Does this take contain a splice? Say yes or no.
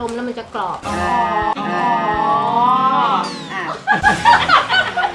no